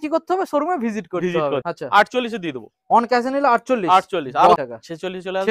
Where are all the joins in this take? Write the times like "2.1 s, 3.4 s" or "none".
1.6 s, 4.6 s